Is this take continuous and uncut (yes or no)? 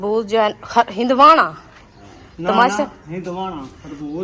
yes